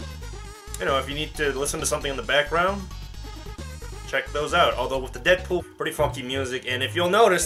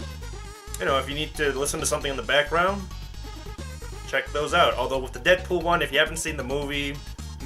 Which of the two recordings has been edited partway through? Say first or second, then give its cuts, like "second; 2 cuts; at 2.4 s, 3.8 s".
second; 1 cut; at 5.6 s